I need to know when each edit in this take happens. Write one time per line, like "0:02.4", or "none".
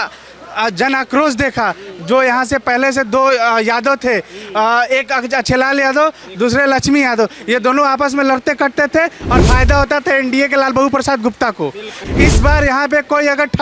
0:12.0